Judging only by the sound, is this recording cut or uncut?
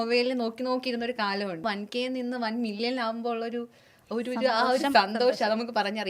cut